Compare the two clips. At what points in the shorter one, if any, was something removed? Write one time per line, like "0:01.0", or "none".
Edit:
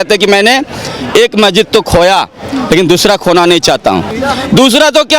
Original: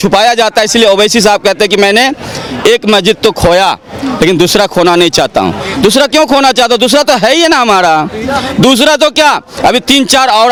0:04.1